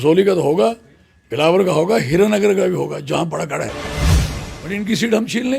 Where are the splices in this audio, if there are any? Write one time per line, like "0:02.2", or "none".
0:03.7
0:04.6